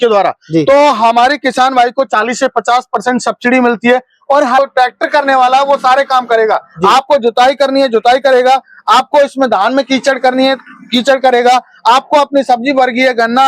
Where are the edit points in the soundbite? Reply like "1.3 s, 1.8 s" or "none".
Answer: 4.6 s